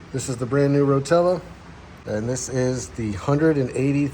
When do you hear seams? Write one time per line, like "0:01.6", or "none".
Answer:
0:01.9